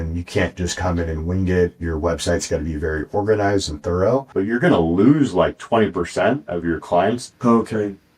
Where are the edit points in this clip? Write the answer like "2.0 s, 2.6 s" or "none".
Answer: 4.3 s, 7.3 s